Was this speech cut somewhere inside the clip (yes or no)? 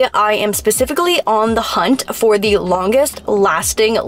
no